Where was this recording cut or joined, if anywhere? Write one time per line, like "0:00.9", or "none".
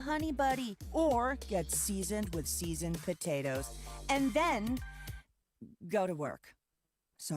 none